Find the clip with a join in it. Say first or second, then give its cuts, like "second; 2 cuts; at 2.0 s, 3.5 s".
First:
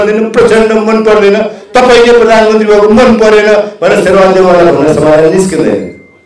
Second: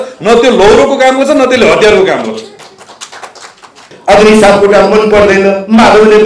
second; 1 cut; at 3.9 s